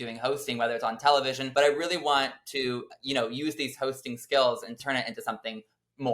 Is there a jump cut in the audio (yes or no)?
yes